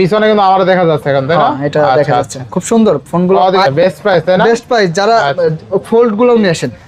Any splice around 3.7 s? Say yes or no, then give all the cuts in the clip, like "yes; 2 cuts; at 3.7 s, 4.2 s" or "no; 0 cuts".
yes; 1 cut; at 3.7 s